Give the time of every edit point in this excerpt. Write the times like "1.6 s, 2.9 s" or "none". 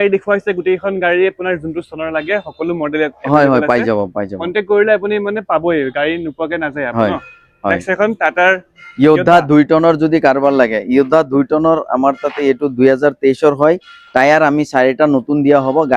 none